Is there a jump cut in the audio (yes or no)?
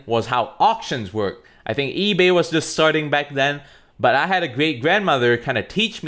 no